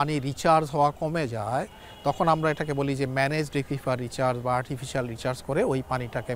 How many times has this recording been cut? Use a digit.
0